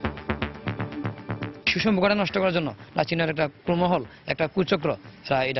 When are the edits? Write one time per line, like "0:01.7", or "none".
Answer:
0:01.6